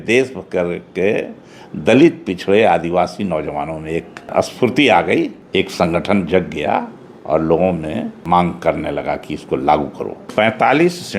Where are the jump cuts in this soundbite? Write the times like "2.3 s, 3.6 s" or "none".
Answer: 4.3 s, 5.4 s, 8.2 s, 10.2 s